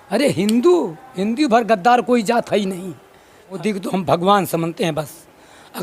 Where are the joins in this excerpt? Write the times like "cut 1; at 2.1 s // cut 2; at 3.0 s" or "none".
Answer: cut 1; at 3.6 s